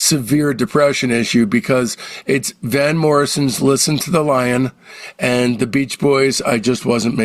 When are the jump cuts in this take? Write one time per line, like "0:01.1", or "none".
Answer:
none

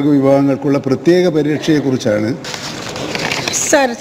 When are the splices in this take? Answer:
0:02.5

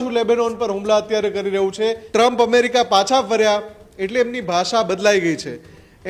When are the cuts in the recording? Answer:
0:02.0

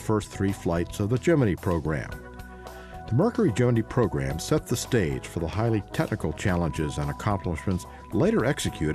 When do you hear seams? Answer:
0:05.1

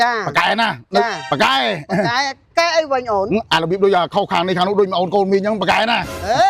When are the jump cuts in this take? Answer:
0:01.2

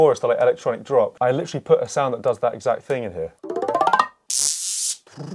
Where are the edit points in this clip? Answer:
0:01.1
0:03.4
0:04.2

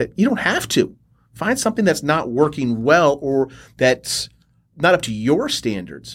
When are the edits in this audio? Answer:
0:04.7

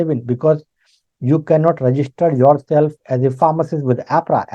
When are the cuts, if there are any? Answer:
none

